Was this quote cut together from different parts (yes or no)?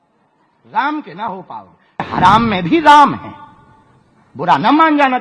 yes